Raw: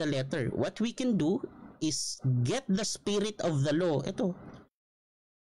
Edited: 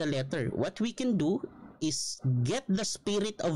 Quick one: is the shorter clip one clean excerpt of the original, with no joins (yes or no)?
yes